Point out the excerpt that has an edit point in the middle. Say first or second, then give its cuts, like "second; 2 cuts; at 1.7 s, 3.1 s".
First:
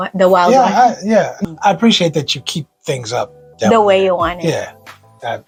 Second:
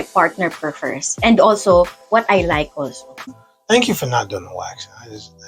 second; 1 cut; at 3.3 s